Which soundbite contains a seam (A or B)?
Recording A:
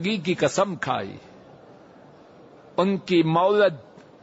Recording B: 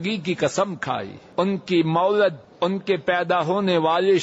B